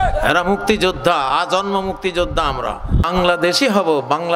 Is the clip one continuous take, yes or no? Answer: no